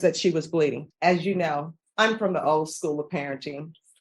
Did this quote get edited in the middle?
yes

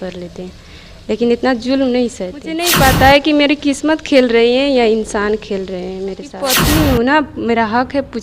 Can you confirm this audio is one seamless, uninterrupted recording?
no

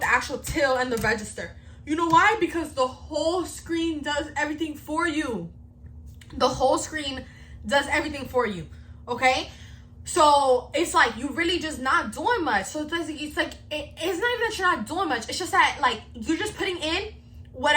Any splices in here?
no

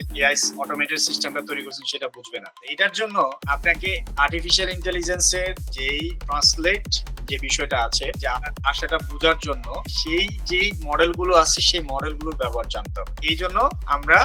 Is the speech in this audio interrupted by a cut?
no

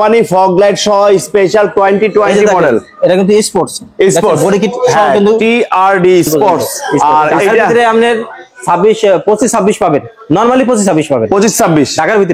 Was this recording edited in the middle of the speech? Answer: yes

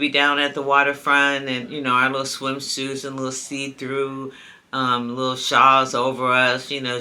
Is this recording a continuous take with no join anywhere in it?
yes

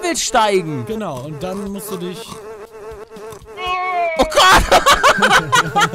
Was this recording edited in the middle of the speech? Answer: no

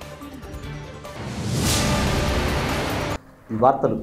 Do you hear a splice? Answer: no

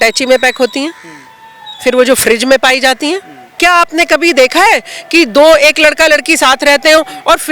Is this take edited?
yes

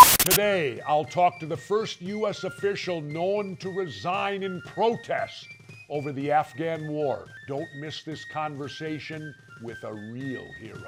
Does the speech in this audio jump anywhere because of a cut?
no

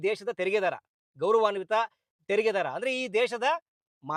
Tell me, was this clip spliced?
no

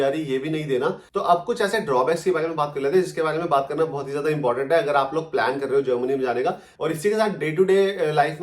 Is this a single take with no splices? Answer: no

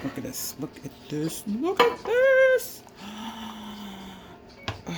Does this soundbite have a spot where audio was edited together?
no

